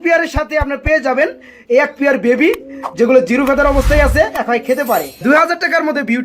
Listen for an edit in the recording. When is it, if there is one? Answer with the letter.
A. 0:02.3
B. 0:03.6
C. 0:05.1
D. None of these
C